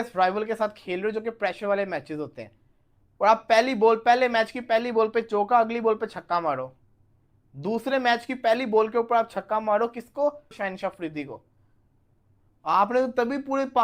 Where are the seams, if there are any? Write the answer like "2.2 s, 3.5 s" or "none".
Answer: 10.6 s